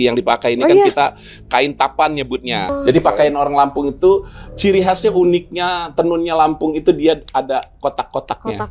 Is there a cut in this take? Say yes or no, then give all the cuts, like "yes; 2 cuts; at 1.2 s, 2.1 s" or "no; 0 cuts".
yes; 1 cut; at 2.7 s